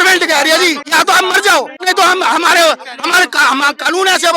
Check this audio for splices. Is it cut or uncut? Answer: cut